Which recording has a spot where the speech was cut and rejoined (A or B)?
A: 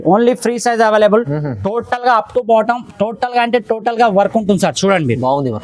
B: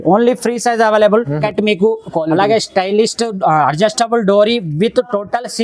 B